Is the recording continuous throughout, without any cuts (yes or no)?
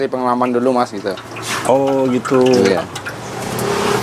yes